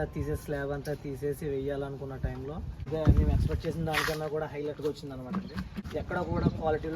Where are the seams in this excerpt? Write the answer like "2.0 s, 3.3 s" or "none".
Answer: 2.9 s, 5.8 s